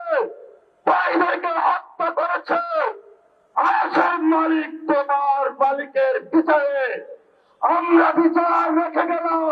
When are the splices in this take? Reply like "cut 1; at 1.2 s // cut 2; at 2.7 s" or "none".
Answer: none